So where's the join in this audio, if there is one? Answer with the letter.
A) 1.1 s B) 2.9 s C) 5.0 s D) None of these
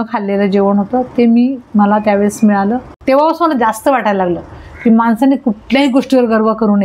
B